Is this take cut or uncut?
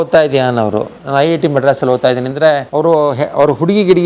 cut